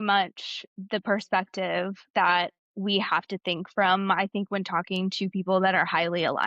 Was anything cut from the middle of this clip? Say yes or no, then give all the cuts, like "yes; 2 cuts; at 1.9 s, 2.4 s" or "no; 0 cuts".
no; 0 cuts